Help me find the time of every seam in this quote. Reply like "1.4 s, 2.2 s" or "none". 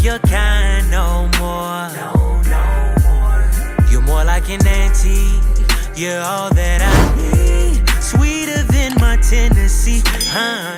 none